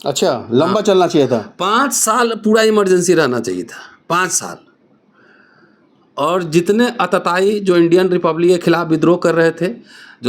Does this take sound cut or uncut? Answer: uncut